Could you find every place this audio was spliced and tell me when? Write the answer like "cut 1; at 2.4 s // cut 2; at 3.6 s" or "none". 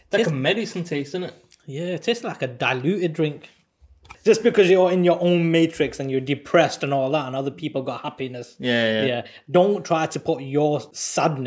cut 1; at 4.1 s